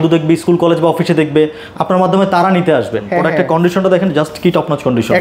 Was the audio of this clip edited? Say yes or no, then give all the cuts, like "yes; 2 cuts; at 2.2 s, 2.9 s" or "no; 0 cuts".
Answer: yes; 1 cut; at 3.0 s